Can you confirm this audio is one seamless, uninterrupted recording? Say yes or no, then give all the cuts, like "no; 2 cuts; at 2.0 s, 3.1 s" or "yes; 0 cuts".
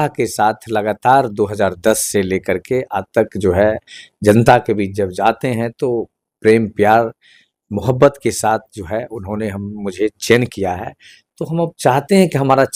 yes; 0 cuts